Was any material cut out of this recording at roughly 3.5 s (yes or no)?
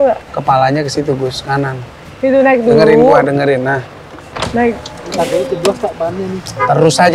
no